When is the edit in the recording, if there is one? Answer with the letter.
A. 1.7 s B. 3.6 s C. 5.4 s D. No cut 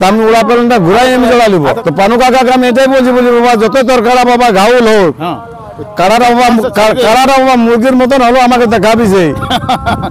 A